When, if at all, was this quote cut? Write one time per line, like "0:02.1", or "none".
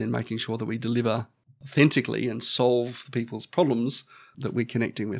0:04.3